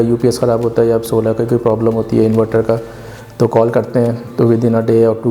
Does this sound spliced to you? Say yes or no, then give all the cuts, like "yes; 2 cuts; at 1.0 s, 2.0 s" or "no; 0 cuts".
no; 0 cuts